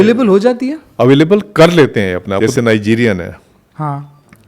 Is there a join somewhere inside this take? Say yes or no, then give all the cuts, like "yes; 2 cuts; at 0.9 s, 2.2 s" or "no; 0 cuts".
yes; 1 cut; at 2.3 s